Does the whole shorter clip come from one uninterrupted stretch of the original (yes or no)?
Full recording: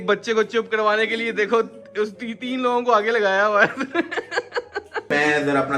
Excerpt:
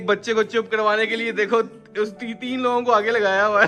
yes